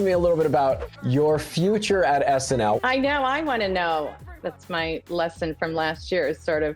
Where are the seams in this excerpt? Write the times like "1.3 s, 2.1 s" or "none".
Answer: 0.9 s, 2.8 s, 4.2 s

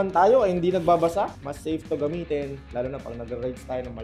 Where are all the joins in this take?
1.4 s

